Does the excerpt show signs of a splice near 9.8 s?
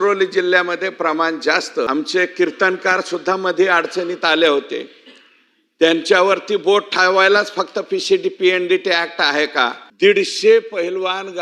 yes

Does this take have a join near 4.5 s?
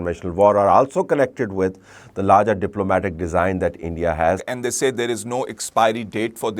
yes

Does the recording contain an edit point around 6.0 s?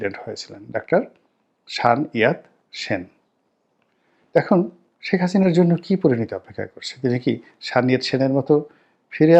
no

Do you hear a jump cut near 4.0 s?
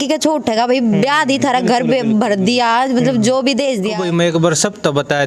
yes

